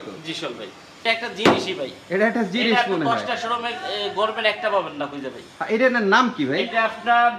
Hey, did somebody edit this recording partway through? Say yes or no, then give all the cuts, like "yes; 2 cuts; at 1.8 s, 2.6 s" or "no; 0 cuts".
yes; 1 cut; at 1.0 s